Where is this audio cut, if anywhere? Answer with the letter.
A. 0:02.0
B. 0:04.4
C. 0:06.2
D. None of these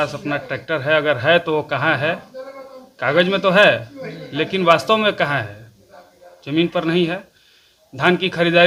D